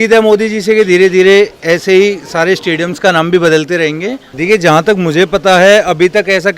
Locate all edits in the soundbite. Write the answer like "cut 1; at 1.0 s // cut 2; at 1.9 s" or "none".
cut 1; at 4.3 s